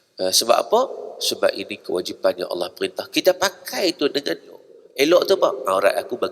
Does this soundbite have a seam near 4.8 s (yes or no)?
yes